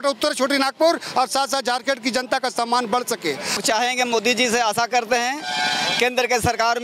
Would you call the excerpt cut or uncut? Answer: cut